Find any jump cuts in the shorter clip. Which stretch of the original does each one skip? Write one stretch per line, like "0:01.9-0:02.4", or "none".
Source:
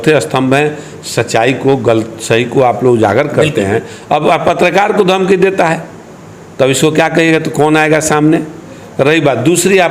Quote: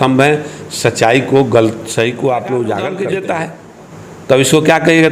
0:03.2-0:05.2